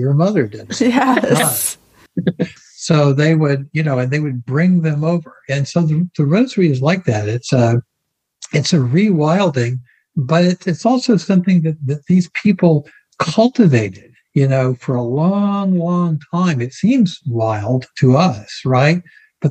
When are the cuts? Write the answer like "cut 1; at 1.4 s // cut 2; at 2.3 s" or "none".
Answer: none